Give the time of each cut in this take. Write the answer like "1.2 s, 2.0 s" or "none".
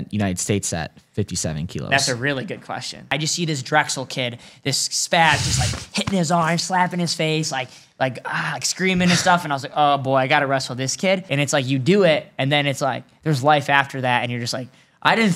3.1 s, 11.3 s